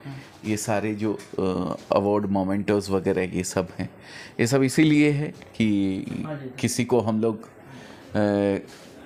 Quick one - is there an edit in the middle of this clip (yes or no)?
no